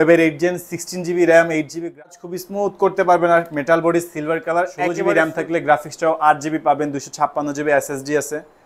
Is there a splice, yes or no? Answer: yes